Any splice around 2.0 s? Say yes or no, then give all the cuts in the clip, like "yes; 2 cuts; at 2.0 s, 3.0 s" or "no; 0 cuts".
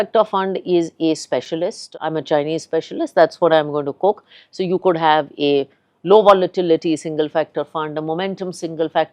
yes; 1 cut; at 2.0 s